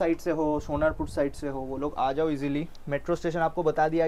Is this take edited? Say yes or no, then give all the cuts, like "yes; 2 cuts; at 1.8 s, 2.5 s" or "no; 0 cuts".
no; 0 cuts